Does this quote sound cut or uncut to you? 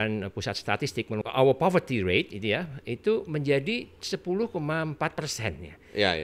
cut